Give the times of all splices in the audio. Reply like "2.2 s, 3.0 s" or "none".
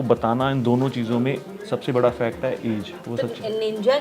3.0 s